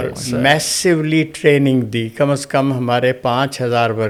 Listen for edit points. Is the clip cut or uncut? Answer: uncut